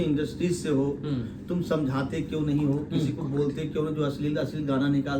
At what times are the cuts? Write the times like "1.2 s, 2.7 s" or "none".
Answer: none